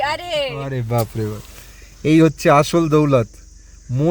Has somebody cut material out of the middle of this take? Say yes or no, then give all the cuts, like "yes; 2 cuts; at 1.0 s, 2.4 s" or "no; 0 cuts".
no; 0 cuts